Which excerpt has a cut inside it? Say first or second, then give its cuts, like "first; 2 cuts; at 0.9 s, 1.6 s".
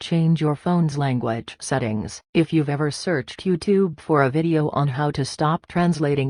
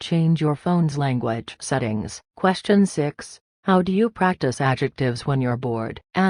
second; 1 cut; at 2.2 s